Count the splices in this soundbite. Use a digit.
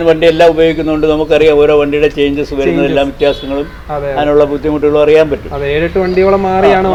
0